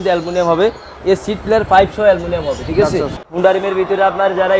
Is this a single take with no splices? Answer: no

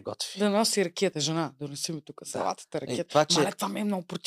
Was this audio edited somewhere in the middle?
no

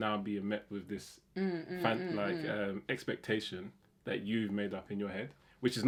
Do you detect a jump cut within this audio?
no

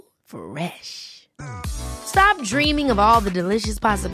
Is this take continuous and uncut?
yes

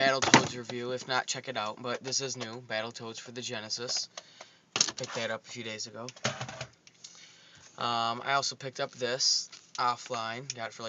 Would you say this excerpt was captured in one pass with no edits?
no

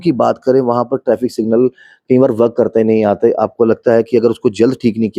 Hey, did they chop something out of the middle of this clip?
no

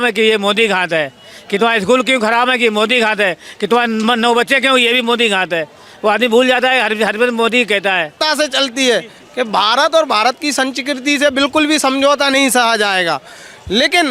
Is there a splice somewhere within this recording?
yes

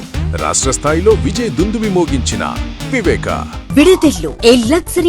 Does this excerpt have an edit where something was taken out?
yes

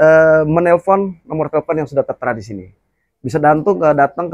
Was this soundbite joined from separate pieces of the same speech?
no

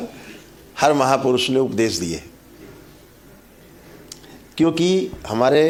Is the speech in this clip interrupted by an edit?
no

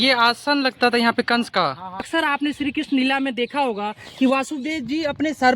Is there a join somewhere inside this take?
yes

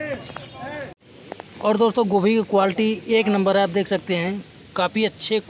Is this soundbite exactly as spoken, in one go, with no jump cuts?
no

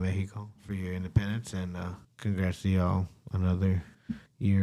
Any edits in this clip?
no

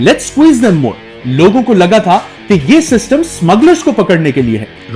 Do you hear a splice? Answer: no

